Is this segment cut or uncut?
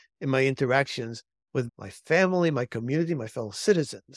cut